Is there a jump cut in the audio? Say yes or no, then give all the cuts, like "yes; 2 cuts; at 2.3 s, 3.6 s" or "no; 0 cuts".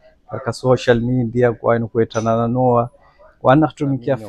no; 0 cuts